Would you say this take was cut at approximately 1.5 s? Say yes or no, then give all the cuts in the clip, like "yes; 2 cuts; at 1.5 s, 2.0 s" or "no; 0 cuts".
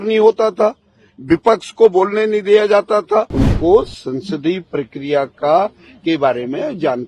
no; 1 cut; at 3.3 s